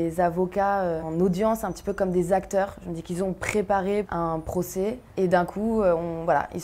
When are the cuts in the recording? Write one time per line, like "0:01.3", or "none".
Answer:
0:01.1
0:04.1
0:05.0